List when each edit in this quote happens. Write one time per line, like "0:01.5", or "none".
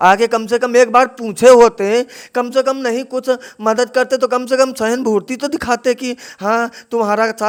none